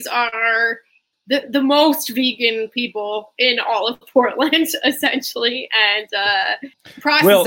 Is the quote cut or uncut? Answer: cut